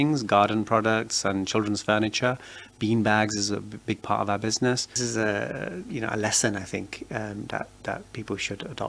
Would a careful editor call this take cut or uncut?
cut